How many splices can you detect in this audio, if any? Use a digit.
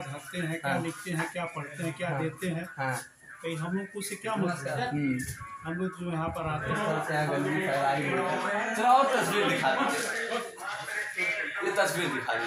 1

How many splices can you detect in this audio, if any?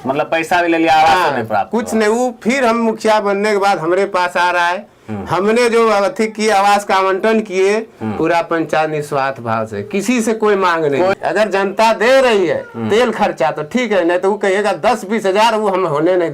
1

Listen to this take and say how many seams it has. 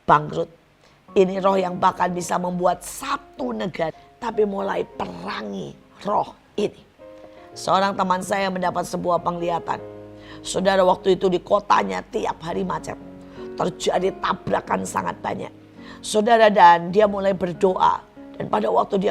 1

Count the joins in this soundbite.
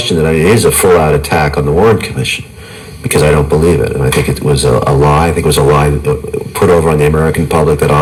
0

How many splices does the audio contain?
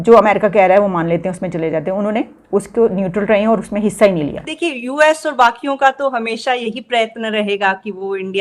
1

